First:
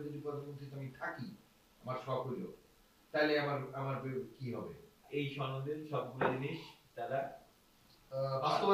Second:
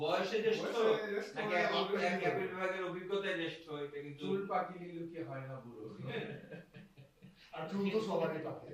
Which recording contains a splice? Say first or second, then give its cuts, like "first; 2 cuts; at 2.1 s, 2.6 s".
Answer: first; 1 cut; at 5.0 s